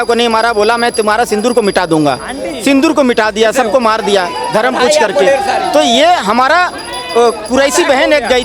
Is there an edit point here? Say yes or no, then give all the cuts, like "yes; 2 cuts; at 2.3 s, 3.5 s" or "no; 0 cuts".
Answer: no; 0 cuts